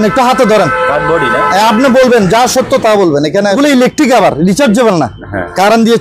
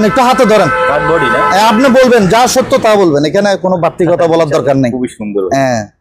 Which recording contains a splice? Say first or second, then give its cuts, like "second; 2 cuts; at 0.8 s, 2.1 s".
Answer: first; 1 cut; at 3.6 s